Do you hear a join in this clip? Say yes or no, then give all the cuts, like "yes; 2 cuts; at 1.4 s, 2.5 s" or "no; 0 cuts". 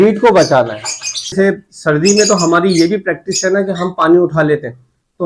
yes; 1 cut; at 1.3 s